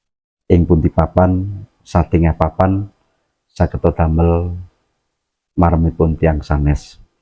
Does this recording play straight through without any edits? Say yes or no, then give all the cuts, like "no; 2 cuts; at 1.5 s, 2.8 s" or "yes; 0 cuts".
yes; 0 cuts